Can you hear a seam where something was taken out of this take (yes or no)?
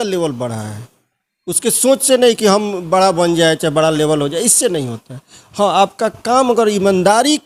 no